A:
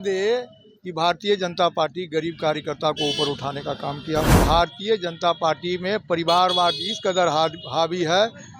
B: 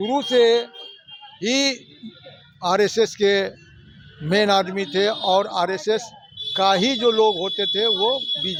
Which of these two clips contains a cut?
A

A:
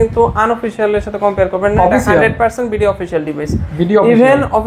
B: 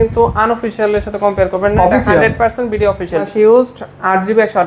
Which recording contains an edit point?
B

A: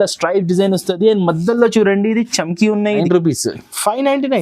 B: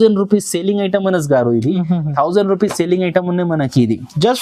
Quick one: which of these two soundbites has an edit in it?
A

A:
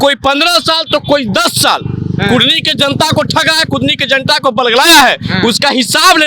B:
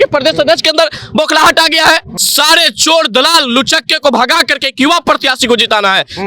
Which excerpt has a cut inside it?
B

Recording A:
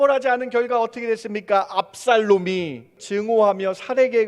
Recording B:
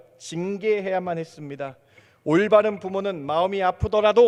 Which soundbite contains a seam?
A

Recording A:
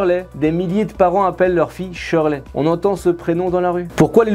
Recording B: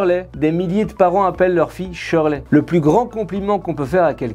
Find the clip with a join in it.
B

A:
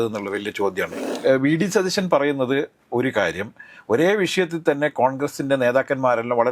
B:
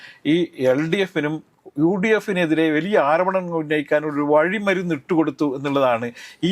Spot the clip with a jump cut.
A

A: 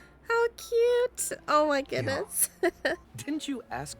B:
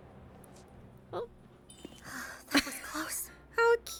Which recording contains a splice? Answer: A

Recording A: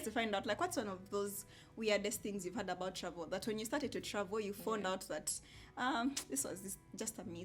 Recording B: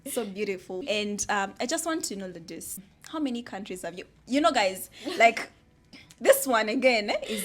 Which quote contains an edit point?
B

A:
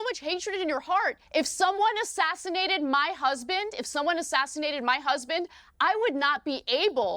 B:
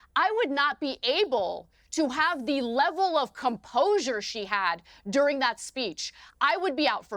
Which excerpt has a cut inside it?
A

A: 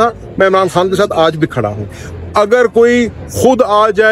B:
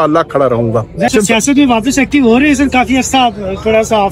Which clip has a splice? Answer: B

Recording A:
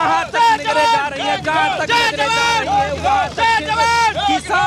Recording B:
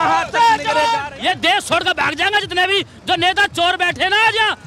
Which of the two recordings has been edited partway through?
B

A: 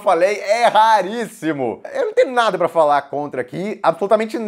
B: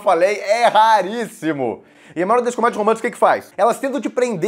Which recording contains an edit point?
A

